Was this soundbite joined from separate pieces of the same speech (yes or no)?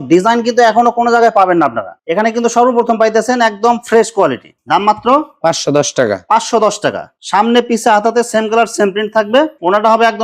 no